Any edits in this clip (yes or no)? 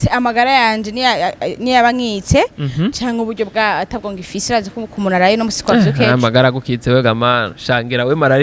no